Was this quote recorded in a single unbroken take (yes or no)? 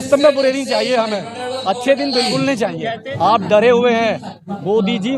no